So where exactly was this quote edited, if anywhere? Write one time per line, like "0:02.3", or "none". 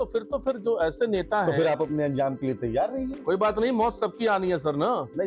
none

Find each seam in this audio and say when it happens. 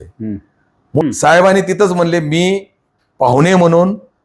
0:01.0

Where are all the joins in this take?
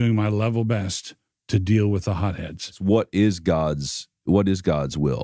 0:02.8

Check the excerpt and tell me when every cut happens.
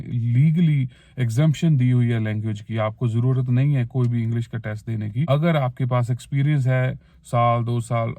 0:05.3

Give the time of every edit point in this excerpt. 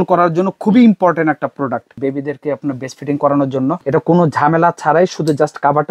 0:01.9
0:03.8

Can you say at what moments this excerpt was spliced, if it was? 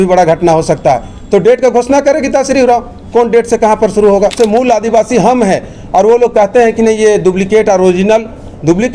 0:04.3

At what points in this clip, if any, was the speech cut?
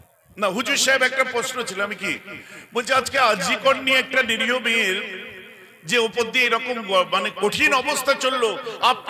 none

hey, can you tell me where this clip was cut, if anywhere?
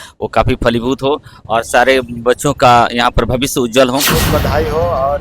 0:04.2

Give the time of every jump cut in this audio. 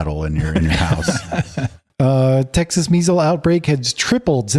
0:01.8

